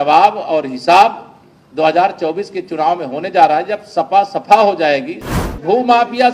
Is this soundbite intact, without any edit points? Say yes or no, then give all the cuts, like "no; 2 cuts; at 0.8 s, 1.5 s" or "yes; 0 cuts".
no; 1 cut; at 5.4 s